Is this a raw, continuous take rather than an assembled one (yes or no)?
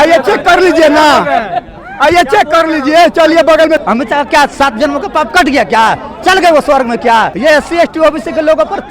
no